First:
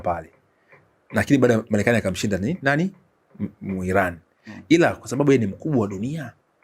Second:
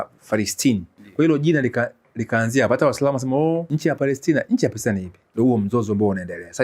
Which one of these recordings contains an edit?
second; 3 cuts; at 1.0 s, 3.7 s, 5.2 s

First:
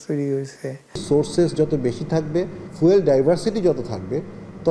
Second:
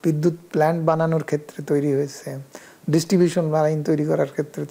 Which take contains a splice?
first; 2 cuts; at 1.0 s, 2.6 s

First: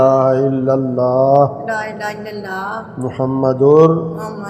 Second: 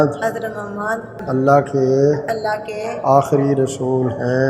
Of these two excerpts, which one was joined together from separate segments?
second; 1 cut; at 1.2 s

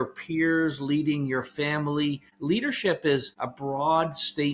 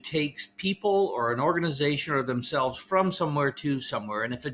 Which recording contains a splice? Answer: first; 2 cuts; at 2.3 s, 3.4 s

